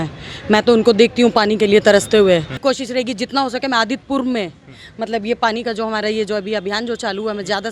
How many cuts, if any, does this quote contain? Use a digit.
1